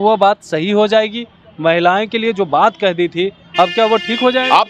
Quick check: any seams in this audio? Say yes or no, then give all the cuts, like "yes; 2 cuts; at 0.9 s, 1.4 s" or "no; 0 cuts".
no; 0 cuts